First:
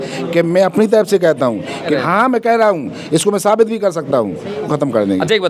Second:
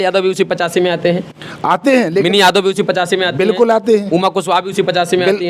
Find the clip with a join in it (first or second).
first